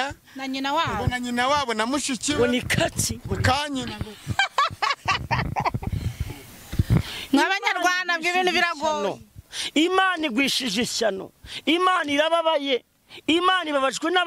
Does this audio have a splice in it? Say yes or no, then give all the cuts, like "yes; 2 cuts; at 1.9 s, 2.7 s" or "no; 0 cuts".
no; 0 cuts